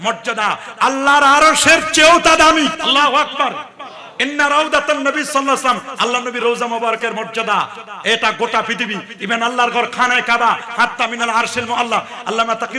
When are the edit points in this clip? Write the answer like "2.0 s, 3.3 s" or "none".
2.8 s